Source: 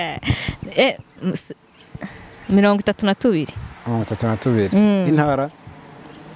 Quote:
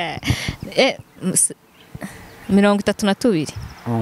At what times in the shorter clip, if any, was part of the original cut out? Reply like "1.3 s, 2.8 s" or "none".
none